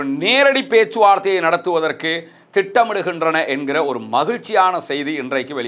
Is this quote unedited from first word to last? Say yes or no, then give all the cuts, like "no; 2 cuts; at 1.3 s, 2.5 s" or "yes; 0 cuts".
yes; 0 cuts